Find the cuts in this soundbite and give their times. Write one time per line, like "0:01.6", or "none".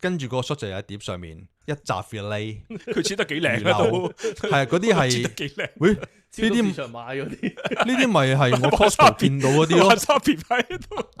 none